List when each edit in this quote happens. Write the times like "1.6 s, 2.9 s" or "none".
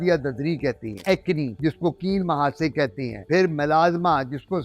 1.0 s

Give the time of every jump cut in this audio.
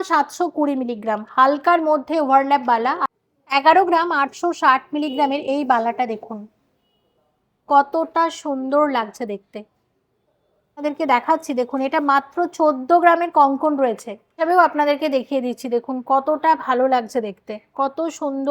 3.0 s, 10.8 s, 14.4 s

